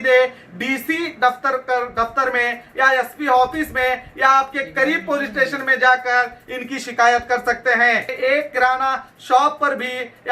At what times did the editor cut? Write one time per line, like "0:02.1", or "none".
0:08.1